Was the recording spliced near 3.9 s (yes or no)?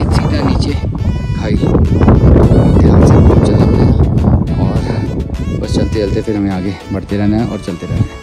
no